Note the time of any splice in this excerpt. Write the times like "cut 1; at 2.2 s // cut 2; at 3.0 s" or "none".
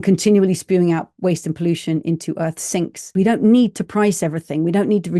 cut 1; at 3.0 s